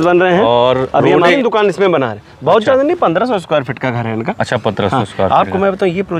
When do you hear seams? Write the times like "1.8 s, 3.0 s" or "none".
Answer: 1.4 s